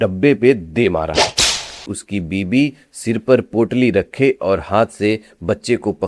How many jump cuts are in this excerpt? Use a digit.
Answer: 1